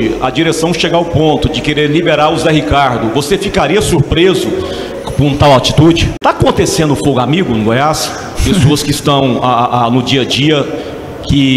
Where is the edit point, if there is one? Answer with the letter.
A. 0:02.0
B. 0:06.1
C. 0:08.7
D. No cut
B